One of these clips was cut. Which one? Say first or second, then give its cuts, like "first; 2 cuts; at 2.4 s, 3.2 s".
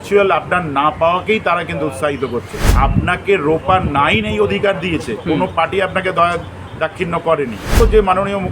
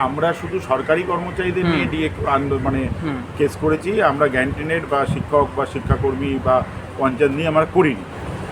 first; 2 cuts; at 2.6 s, 7.8 s